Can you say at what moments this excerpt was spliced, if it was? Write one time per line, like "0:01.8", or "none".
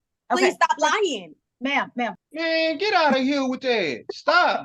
0:02.1